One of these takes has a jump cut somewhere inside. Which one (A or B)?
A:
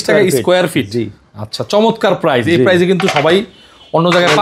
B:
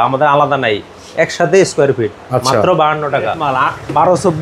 B